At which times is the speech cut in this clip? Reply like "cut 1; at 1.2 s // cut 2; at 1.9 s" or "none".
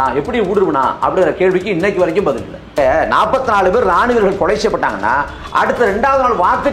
cut 1; at 2.7 s